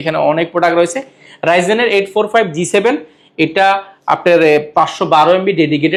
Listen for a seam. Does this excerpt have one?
no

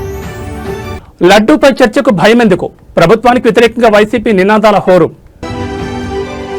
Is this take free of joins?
no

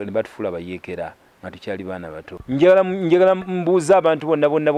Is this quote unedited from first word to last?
no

